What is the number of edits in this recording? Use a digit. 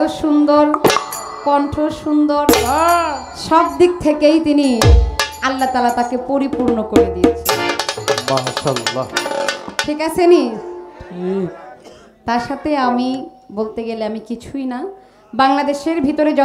0